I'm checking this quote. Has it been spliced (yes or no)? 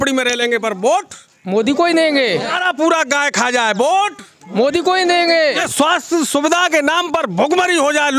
yes